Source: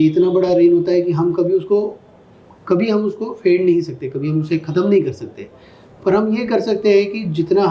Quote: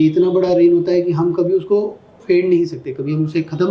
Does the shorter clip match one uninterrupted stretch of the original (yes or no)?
no